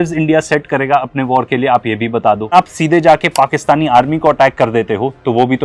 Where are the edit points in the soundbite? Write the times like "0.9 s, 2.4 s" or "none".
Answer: 2.5 s